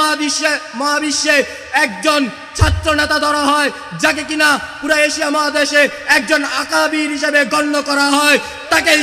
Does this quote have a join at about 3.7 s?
no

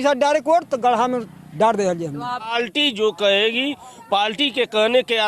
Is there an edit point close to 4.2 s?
no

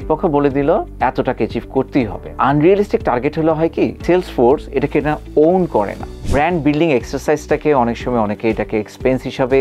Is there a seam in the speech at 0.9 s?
yes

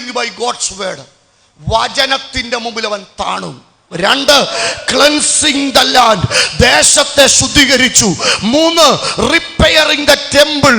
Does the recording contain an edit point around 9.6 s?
no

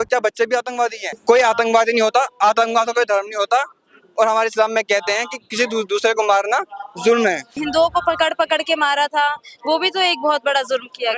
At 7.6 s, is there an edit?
yes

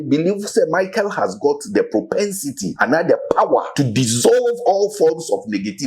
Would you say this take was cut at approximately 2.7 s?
yes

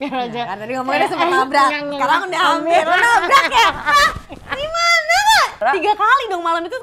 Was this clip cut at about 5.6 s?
yes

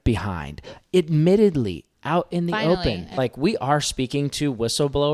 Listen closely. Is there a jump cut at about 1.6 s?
no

